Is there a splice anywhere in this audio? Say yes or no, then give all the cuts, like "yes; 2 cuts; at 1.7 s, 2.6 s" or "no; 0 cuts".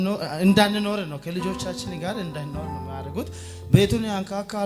no; 0 cuts